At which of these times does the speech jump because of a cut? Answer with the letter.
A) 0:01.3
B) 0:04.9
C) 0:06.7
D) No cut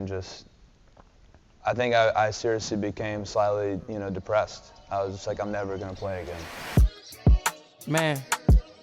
C